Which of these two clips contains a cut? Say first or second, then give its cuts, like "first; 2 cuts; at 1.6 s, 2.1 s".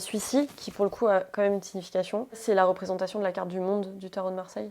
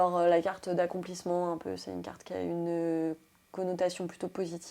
first; 1 cut; at 2.4 s